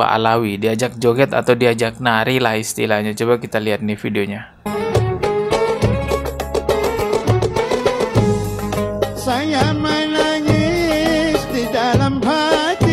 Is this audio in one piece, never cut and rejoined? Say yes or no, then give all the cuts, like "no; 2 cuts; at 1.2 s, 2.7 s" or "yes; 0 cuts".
yes; 0 cuts